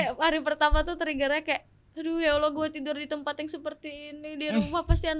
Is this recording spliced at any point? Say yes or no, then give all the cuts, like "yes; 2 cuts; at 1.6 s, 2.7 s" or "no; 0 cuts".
no; 0 cuts